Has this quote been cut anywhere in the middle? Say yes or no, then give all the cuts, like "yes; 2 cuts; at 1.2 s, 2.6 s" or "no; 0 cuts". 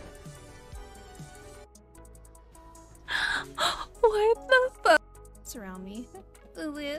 no; 0 cuts